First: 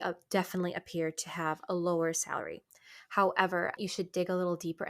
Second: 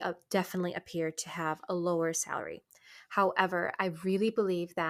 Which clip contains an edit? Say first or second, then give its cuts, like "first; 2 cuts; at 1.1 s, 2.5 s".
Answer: first; 1 cut; at 3.7 s